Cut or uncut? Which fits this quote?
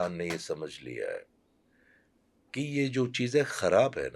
uncut